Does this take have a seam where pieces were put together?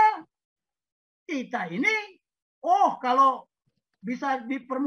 no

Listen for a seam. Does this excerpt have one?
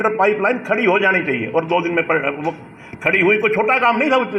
no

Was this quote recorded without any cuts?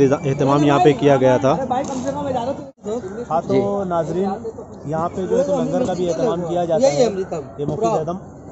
yes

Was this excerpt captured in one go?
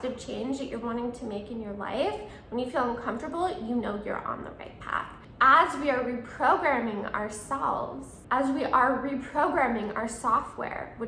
no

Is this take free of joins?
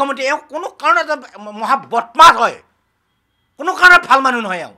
yes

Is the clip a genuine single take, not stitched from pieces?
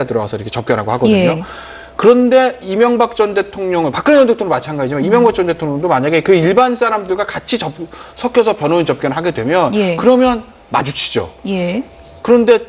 no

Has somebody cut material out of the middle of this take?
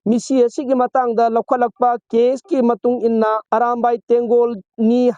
yes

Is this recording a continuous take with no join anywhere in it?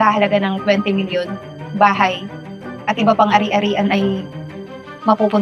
yes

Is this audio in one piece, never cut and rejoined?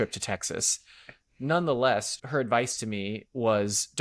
no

